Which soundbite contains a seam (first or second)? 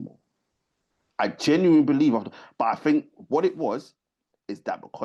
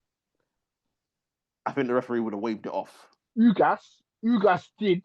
second